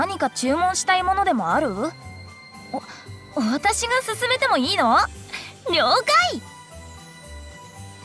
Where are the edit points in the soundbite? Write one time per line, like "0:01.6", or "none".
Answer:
0:06.4